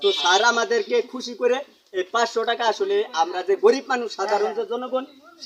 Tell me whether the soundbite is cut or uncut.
uncut